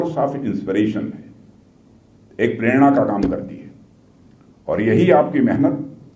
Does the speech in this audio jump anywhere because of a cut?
no; 0 cuts

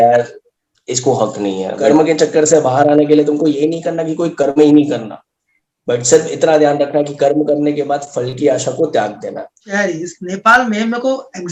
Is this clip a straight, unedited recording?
no; 2 cuts; at 1.8 s, 9.6 s

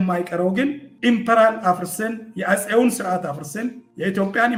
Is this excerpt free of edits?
yes; 0 cuts

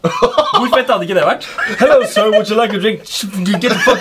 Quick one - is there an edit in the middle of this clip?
yes; 1 cut; at 1.5 s

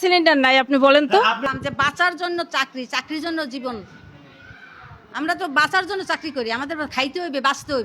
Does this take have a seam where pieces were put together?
yes; 1 cut; at 1.4 s

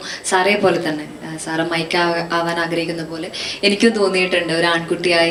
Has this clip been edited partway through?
no; 0 cuts

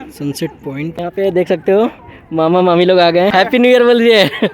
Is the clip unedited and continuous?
no; 2 cuts; at 1.1 s, 3.4 s

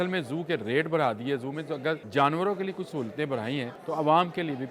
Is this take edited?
yes; 2 cuts; at 2.0 s, 3.8 s

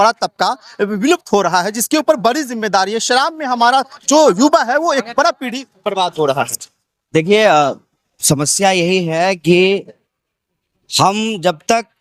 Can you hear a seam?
no; 0 cuts

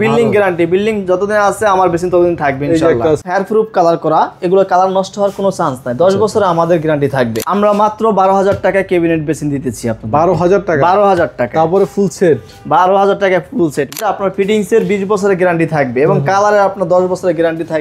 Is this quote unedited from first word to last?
no; 3 cuts; at 3.2 s, 7.4 s, 14.0 s

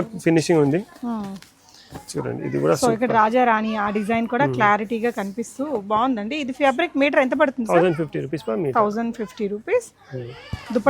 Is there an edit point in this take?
no; 0 cuts

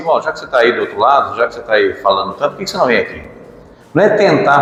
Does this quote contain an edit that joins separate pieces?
no; 0 cuts

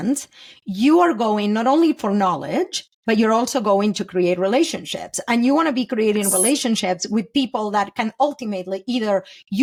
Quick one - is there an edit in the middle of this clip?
no; 0 cuts

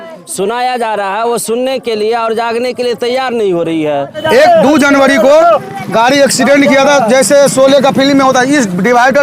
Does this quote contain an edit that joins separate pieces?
yes; 1 cut; at 4.2 s

